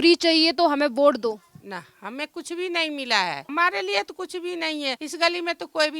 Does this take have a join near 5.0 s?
yes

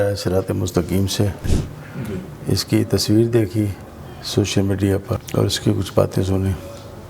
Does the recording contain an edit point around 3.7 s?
no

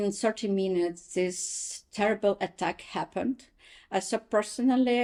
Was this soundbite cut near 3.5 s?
no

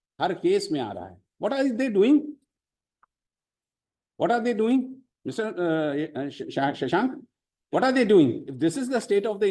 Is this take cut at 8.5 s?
yes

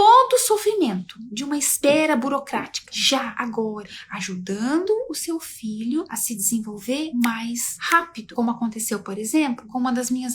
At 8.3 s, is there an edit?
yes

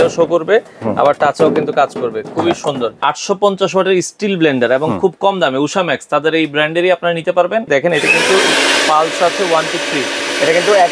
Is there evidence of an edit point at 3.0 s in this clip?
yes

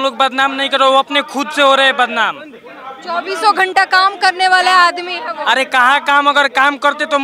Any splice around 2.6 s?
no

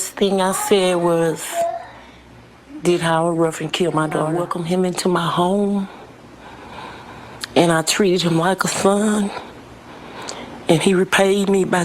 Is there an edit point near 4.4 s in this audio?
yes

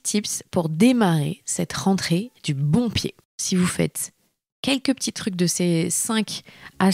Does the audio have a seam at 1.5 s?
no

